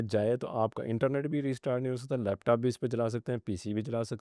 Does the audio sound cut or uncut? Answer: uncut